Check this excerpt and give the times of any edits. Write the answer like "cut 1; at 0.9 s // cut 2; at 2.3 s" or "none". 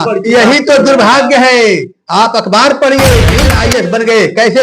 cut 1; at 3.5 s